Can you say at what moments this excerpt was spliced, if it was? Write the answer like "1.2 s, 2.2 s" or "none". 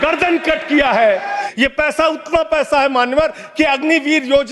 1.5 s